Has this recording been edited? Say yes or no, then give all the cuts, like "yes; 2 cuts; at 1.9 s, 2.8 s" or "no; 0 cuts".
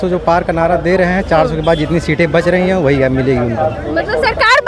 no; 0 cuts